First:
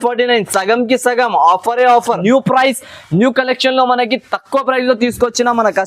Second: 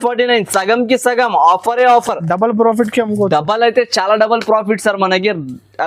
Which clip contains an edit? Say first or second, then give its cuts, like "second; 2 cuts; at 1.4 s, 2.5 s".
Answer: first; 1 cut; at 2.1 s